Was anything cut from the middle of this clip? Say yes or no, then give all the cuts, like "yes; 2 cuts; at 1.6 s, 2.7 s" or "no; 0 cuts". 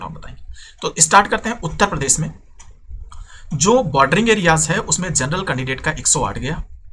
no; 0 cuts